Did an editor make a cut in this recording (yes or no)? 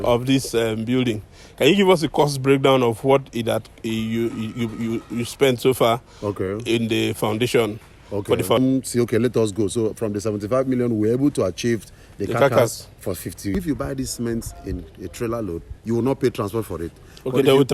yes